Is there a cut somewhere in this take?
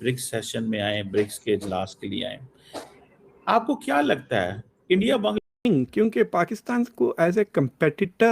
yes; 1 cut; at 5.4 s

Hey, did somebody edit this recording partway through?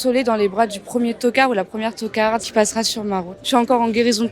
yes; 1 cut; at 3.4 s

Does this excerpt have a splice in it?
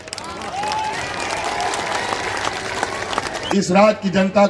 yes; 1 cut; at 3.5 s

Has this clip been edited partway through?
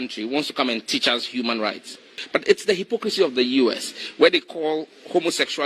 yes; 1 cut; at 2.1 s

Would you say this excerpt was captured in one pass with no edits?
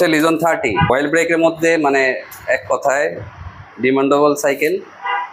no; 1 cut; at 0.9 s

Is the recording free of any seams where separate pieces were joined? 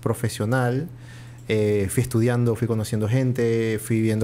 yes; 0 cuts

